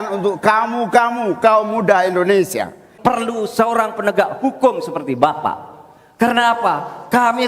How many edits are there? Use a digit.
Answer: 1